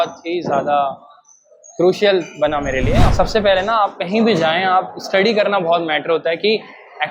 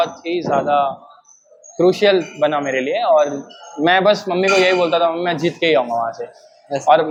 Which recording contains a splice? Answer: first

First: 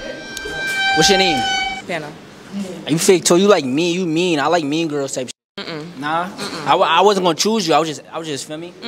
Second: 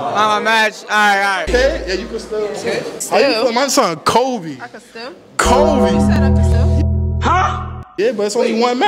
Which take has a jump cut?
second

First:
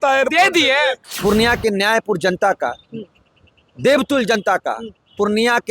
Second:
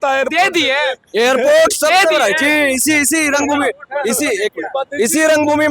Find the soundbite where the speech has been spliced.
first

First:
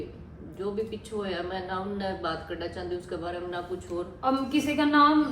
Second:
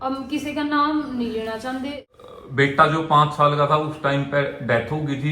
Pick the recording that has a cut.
second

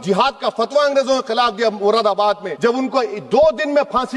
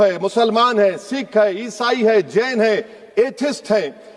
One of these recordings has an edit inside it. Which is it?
first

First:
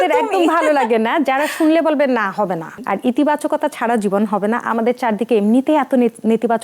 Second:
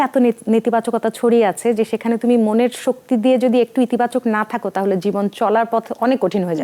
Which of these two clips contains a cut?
first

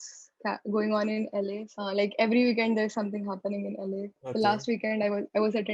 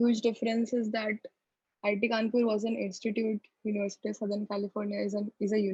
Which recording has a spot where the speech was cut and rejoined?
first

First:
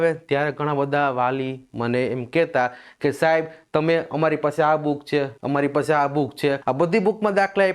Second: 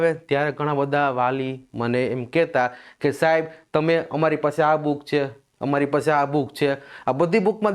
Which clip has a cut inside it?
first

